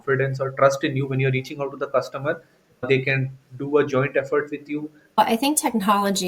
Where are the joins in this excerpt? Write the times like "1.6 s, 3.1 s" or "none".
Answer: 5.2 s